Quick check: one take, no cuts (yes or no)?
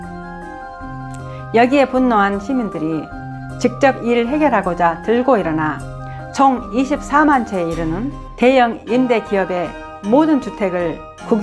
no